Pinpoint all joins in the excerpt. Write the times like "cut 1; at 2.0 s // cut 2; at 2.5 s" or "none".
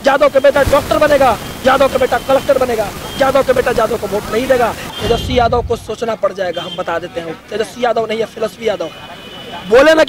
cut 1; at 4.8 s